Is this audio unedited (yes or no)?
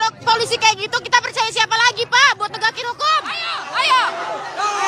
no